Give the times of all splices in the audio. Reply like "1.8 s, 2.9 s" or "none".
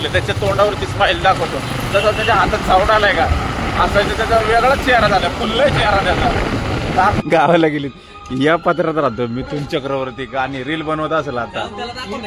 7.2 s